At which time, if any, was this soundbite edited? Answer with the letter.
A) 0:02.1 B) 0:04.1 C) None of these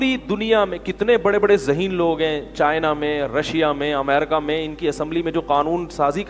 C